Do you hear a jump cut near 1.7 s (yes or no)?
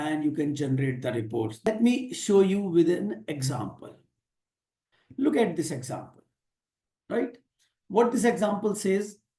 yes